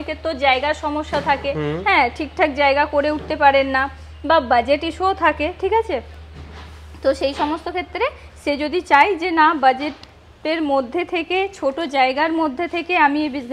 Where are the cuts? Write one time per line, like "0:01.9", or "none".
none

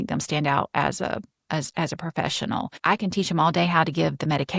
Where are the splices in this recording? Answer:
0:02.7

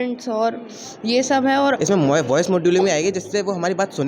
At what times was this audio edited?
0:01.8

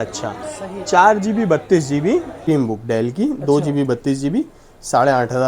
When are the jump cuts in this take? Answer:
0:02.3

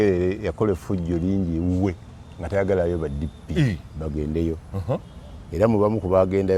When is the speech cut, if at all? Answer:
none

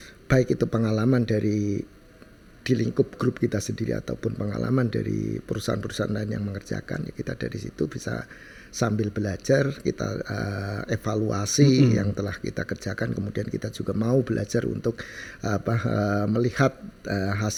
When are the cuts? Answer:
none

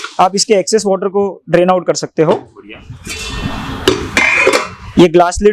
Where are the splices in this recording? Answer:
none

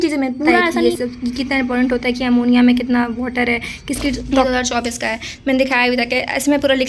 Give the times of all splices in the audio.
0:00.8
0:04.3

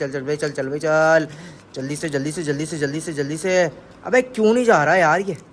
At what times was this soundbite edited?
none

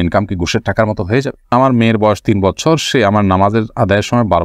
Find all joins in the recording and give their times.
0:01.5

